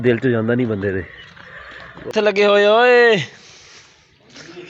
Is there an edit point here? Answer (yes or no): yes